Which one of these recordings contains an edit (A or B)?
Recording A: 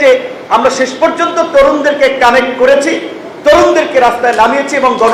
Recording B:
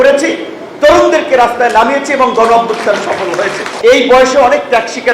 B